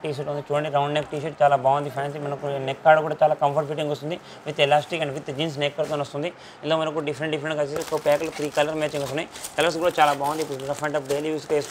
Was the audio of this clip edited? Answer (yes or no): no